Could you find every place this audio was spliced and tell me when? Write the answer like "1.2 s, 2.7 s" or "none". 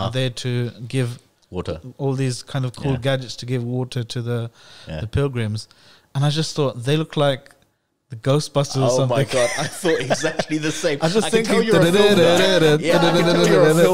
none

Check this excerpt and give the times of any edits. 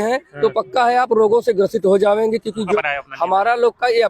2.7 s

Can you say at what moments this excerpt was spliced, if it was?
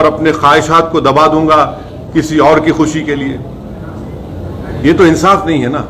none

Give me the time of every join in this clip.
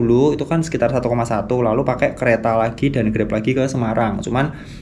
none

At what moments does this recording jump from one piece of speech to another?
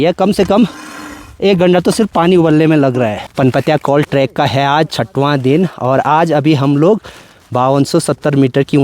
3.2 s

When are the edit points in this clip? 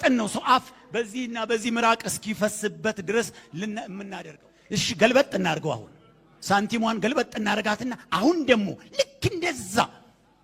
4.0 s

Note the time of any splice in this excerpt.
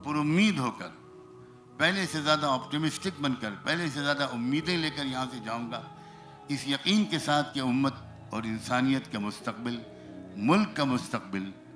none

